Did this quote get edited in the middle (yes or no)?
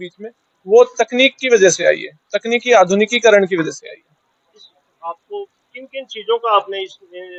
no